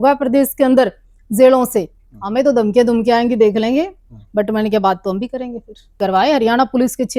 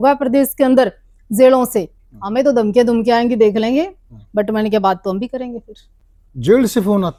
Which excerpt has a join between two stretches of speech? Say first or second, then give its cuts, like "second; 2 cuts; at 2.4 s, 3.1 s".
first; 1 cut; at 5.9 s